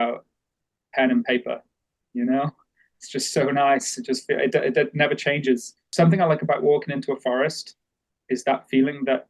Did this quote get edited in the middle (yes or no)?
yes